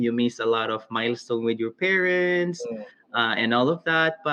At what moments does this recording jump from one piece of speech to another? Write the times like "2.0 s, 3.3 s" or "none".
none